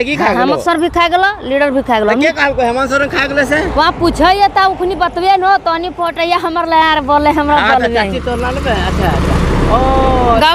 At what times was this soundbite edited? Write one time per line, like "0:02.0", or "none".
none